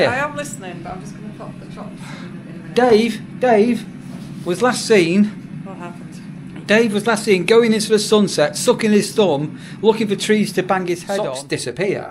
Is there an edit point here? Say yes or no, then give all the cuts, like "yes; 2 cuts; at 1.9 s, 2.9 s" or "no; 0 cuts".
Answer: yes; 1 cut; at 11.1 s